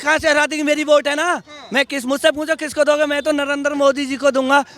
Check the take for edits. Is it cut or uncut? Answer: uncut